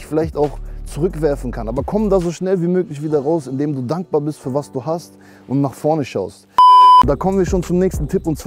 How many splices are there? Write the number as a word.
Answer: zero